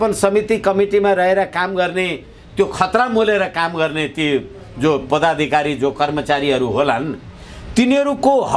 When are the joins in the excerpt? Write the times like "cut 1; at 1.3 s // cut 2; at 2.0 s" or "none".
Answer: none